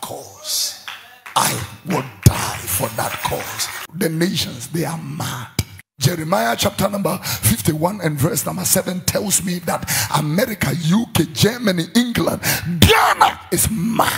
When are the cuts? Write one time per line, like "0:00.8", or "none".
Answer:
0:03.8